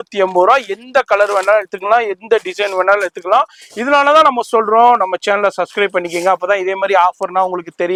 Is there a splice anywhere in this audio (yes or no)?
no